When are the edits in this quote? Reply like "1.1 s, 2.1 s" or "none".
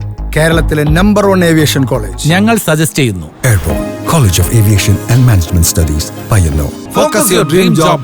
6.8 s